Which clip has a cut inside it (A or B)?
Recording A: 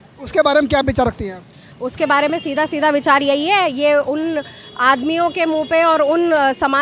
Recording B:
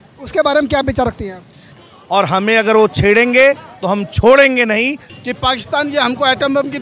B